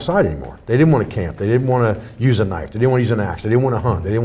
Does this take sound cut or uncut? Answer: uncut